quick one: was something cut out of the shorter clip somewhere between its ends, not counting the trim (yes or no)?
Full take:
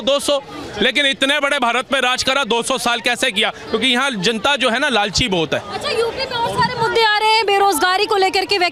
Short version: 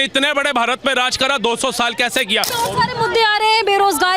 yes